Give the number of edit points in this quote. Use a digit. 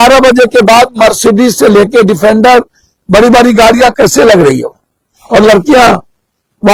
0